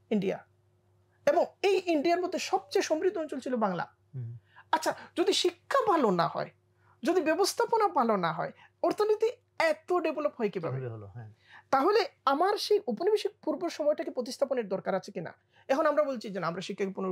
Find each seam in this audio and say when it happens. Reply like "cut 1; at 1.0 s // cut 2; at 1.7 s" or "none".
none